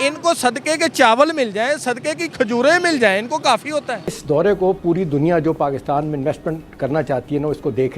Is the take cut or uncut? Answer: cut